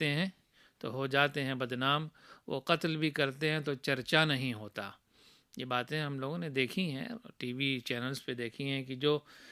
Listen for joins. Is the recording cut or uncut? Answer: uncut